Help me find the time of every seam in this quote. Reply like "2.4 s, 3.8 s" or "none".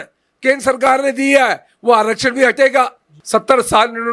3.1 s